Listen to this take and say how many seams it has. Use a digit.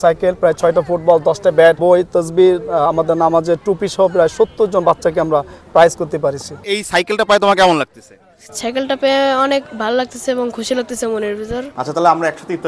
3